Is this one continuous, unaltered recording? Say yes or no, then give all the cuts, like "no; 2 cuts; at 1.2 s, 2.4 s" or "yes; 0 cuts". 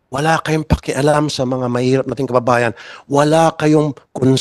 yes; 0 cuts